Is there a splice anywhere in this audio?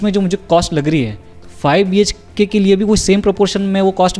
no; 0 cuts

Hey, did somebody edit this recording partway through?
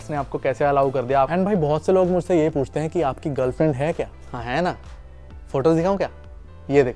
yes; 2 cuts; at 1.3 s, 4.3 s

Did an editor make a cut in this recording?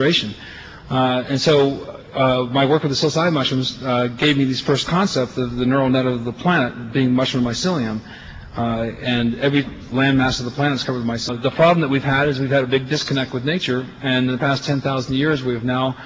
no; 0 cuts

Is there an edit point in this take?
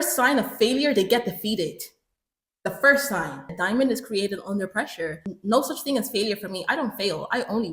yes; 2 cuts; at 3.5 s, 5.3 s

